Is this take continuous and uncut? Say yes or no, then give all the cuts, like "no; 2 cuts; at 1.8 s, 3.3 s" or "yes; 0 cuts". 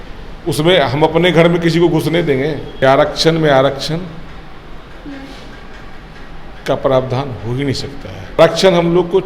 no; 2 cuts; at 2.7 s, 8.4 s